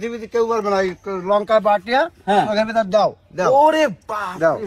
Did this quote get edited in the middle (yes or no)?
no